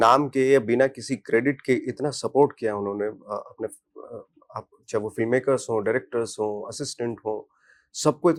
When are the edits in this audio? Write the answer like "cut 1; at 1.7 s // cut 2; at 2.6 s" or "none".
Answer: none